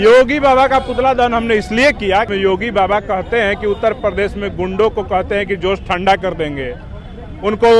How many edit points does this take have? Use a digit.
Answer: 1